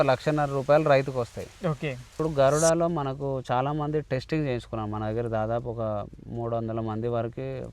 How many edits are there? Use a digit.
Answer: 1